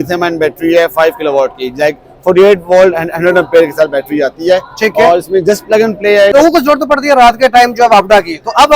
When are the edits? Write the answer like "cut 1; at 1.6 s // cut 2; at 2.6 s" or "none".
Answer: cut 1; at 6.3 s